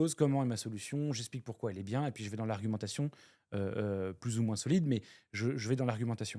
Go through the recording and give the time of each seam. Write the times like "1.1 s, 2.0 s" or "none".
none